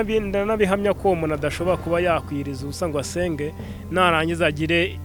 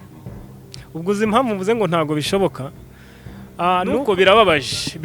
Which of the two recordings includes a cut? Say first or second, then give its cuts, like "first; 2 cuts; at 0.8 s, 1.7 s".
second; 1 cut; at 4.0 s